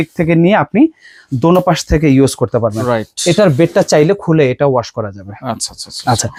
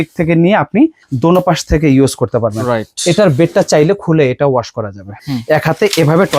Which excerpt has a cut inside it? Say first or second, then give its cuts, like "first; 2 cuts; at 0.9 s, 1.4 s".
second; 2 cuts; at 1.1 s, 5.2 s